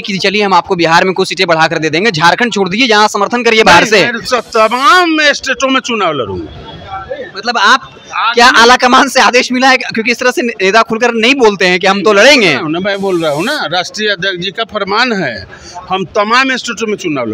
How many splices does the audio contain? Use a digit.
0